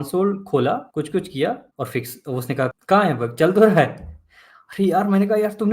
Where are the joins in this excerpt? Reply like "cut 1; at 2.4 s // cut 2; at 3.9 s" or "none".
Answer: cut 1; at 0.9 s // cut 2; at 1.7 s // cut 3; at 2.7 s

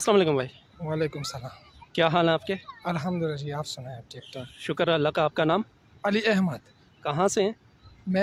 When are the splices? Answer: none

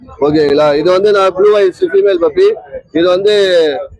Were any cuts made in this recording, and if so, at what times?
none

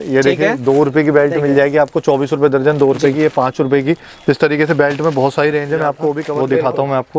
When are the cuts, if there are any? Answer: cut 1; at 6.2 s

